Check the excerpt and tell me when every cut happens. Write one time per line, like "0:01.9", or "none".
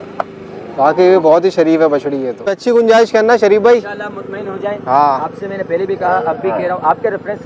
0:02.3